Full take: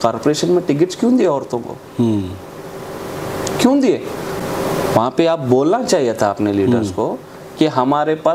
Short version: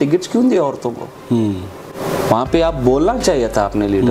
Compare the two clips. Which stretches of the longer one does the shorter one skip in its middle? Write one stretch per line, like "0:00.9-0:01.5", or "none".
0:02.6-0:04.6

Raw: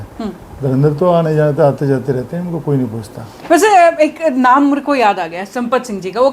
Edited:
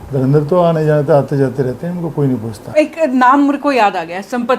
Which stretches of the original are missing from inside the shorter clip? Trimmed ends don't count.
0:03.2-0:04.0

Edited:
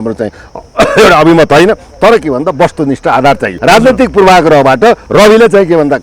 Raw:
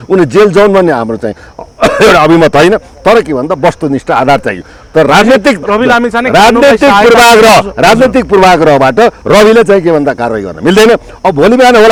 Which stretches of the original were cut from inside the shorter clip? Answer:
0:04.6-0:07.7

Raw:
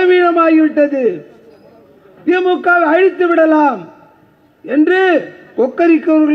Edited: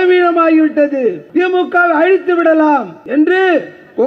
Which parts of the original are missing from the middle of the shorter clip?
0:01.2-0:02.1
0:03.9-0:04.6

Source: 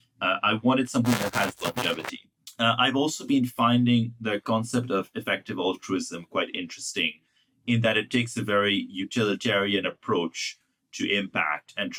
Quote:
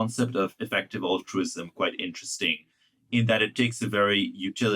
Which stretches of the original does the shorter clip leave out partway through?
none

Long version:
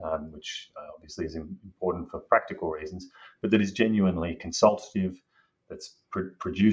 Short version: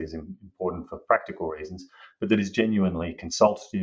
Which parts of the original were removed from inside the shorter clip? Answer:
none

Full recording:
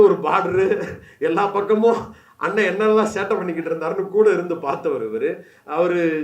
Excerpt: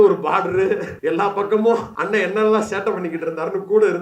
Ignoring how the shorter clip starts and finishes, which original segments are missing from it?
0:00.9-0:01.1
0:02.1-0:02.4

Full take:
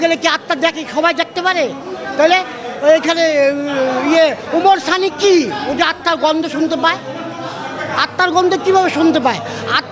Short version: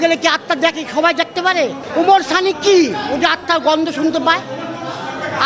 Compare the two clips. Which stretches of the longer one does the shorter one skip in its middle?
0:01.8-0:04.4

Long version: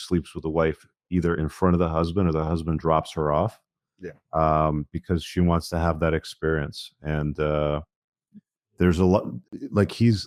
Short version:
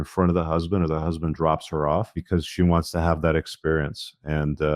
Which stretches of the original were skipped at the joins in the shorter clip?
0:03.6-0:04.9

